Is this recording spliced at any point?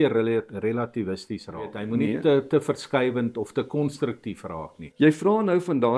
yes; 2 cuts; at 1.8 s, 4.8 s

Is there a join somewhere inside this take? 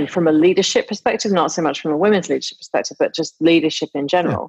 no; 0 cuts

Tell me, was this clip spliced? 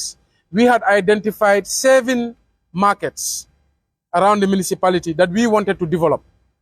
no; 0 cuts

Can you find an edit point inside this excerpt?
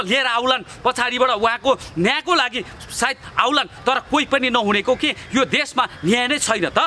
no; 0 cuts

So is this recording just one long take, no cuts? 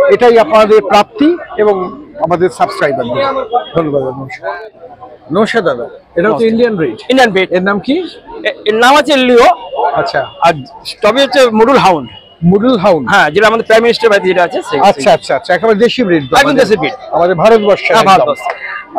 yes; 0 cuts

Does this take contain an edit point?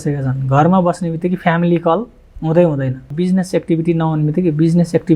yes; 1 cut; at 3.1 s

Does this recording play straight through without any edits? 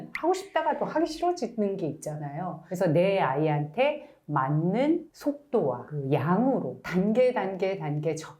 no; 1 cut; at 2.6 s

